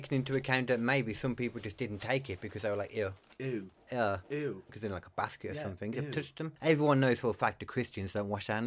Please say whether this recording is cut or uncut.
cut